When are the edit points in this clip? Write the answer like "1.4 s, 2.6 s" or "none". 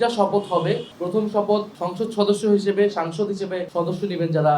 0.9 s, 1.8 s, 3.6 s